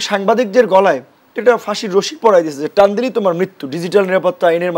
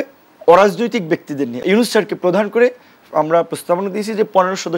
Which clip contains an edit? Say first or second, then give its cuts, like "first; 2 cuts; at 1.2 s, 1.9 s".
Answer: second; 1 cut; at 1.5 s